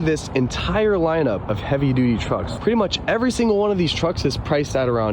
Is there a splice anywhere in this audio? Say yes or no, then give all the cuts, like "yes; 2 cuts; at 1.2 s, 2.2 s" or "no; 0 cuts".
yes; 2 cuts; at 1.4 s, 2.5 s